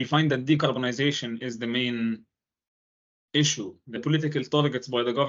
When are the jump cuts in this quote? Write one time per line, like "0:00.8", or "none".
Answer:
0:04.0